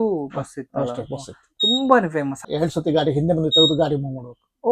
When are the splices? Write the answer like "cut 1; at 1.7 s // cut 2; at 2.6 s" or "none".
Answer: cut 1; at 2.4 s